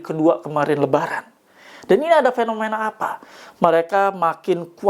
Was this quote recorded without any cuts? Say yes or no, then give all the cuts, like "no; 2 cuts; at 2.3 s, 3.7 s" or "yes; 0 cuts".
yes; 0 cuts